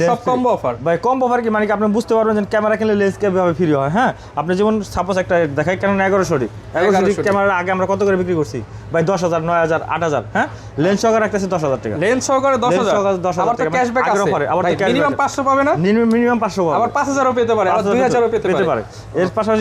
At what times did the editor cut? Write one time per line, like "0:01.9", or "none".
none